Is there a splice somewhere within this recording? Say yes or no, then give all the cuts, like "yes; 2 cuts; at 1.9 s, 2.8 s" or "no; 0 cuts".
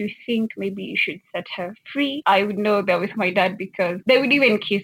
yes; 2 cuts; at 2.2 s, 4.0 s